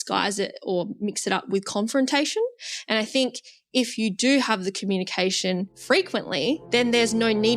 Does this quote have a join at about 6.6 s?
yes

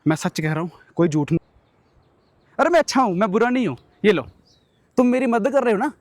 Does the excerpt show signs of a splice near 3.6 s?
no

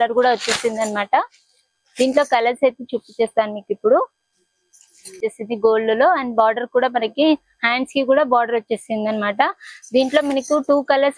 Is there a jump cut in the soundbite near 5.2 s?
yes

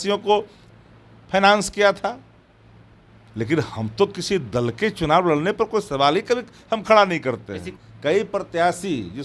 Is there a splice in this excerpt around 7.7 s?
yes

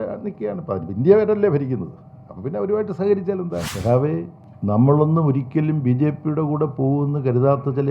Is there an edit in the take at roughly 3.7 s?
yes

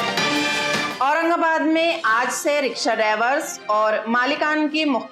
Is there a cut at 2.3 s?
no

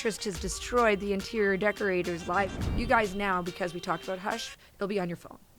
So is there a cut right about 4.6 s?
no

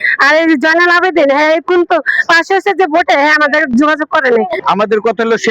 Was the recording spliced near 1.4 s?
no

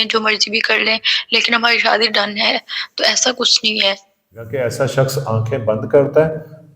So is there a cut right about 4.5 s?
yes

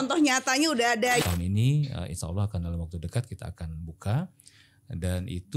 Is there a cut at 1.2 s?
yes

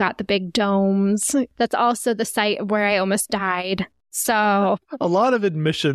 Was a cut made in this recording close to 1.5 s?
yes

